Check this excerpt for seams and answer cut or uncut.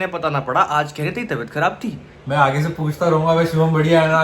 cut